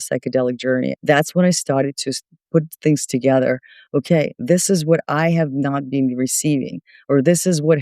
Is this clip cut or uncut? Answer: cut